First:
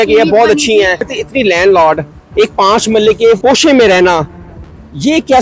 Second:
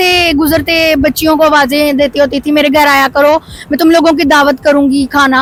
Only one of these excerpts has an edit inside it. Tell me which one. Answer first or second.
first